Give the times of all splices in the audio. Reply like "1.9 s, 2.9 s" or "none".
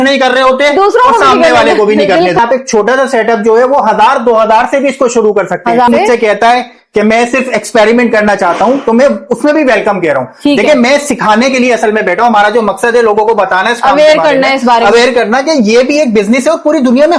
2.4 s, 5.9 s